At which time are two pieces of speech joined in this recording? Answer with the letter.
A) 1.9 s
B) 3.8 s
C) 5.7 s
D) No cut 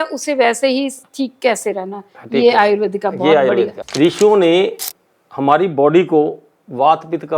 B